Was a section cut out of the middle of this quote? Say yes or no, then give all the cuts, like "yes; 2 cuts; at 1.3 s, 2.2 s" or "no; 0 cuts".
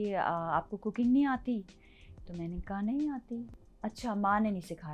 yes; 1 cut; at 3.5 s